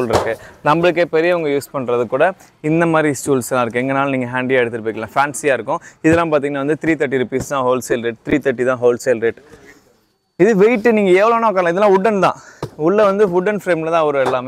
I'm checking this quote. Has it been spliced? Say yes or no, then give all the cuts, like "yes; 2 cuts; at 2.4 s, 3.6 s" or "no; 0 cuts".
no; 0 cuts